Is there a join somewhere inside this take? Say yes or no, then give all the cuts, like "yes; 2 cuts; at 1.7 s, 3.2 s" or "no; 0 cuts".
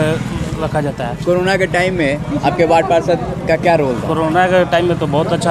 no; 0 cuts